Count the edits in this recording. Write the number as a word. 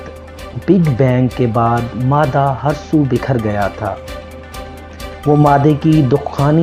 zero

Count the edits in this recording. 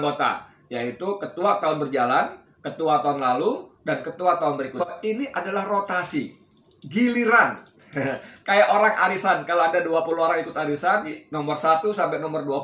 two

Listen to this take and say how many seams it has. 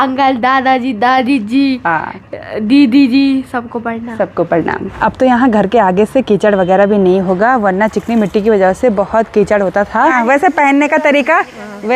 two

